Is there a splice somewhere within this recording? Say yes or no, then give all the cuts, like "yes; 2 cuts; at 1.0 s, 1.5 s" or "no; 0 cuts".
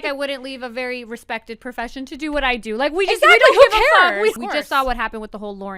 yes; 1 cut; at 4.4 s